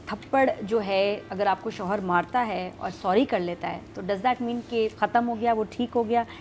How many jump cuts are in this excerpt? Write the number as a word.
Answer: two